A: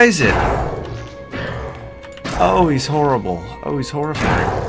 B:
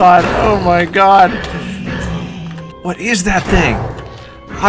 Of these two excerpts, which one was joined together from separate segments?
B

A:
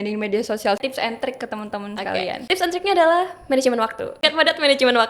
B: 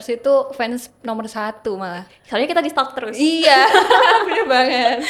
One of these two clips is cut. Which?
A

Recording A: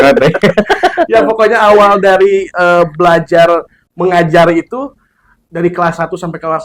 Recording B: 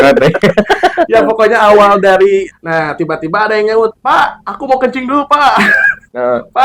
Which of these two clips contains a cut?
B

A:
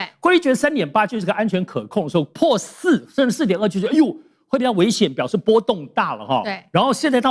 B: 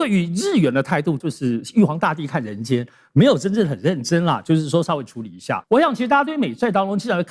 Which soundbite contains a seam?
B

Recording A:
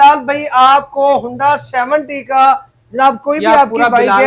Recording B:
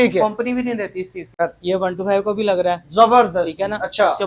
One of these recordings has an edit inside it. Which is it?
B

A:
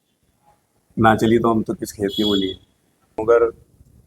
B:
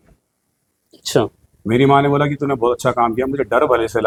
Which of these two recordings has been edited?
A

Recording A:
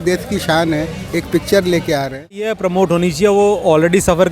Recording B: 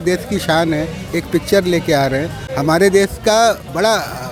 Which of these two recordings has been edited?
A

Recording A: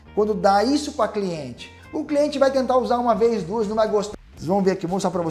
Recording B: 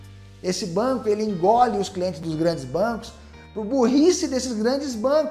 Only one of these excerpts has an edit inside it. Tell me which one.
A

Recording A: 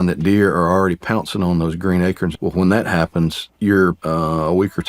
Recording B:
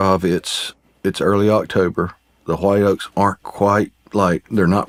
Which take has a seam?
A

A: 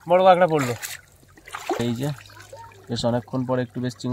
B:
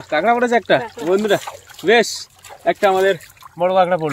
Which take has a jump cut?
A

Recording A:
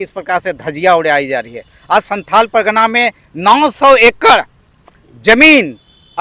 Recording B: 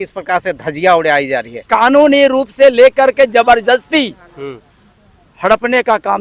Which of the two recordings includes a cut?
B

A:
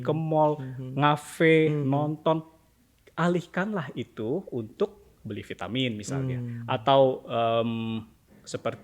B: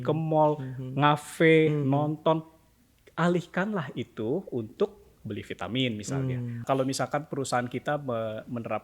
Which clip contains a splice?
B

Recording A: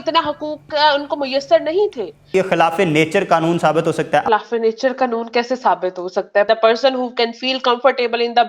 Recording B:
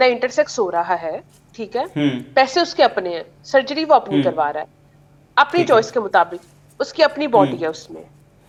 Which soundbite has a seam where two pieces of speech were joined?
A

